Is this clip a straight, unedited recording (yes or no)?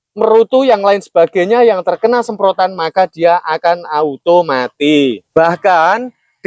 no